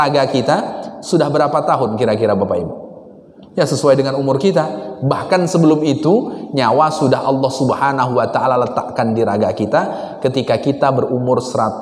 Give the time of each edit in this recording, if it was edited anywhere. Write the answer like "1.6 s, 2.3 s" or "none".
none